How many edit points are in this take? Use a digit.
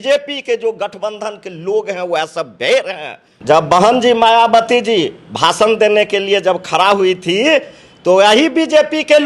1